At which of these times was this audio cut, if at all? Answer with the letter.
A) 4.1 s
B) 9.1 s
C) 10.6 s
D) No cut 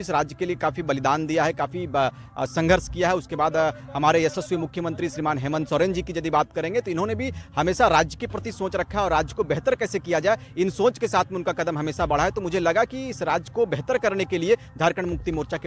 D